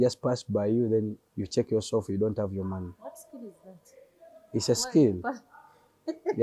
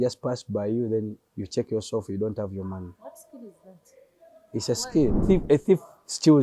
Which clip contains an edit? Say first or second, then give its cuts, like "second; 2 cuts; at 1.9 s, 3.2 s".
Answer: second; 1 cut; at 5.2 s